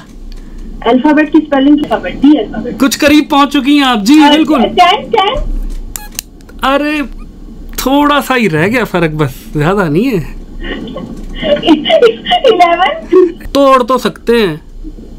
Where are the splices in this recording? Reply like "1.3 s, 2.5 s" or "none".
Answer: 1.8 s, 13.4 s